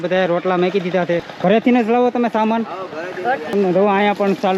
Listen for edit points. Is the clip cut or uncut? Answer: cut